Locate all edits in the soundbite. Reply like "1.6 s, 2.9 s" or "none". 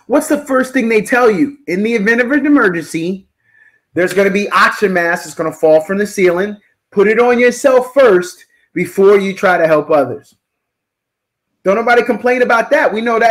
none